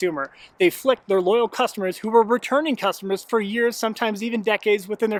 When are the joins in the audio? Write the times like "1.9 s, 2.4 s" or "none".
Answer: none